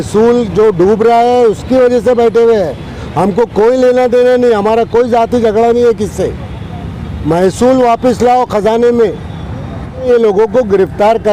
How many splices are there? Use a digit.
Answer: 1